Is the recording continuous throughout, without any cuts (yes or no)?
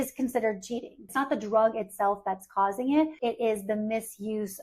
no